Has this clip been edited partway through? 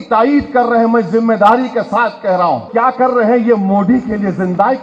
yes; 1 cut; at 2.7 s

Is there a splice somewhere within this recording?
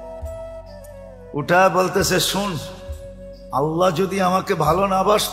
no; 0 cuts

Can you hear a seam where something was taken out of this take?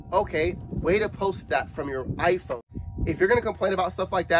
yes; 1 cut; at 2.6 s

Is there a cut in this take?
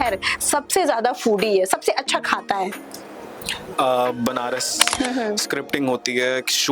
yes; 1 cut; at 4.8 s

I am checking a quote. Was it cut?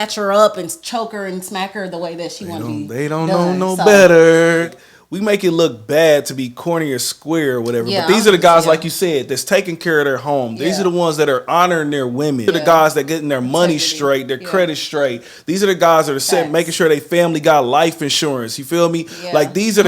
yes; 2 cuts; at 4.8 s, 12.4 s

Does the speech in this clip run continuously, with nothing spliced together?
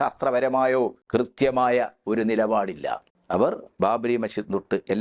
no; 2 cuts; at 1.0 s, 3.1 s

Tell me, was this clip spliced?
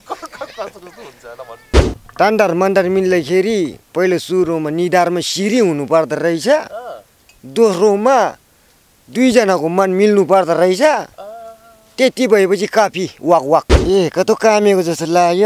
yes; 2 cuts; at 2.0 s, 13.7 s

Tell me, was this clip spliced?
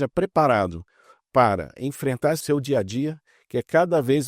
yes; 1 cut; at 2.4 s

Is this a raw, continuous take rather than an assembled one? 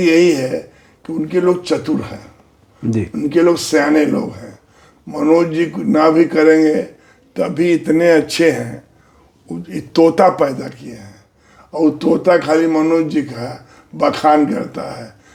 yes; 0 cuts

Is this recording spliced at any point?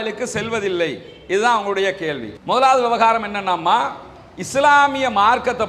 no; 0 cuts

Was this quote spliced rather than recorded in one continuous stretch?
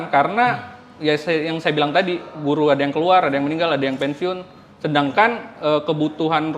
no; 0 cuts

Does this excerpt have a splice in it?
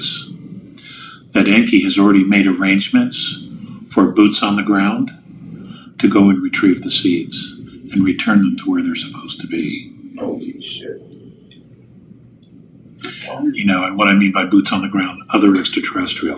no; 0 cuts

